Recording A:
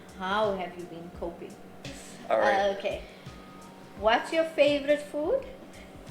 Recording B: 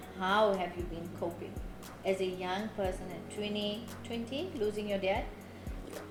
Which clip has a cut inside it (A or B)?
A